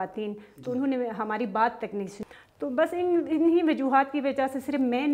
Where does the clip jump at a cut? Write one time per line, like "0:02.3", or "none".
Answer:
0:02.1